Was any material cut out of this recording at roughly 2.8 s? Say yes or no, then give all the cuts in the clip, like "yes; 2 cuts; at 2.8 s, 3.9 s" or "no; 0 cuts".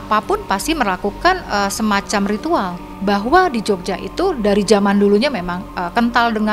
yes; 1 cut; at 2.8 s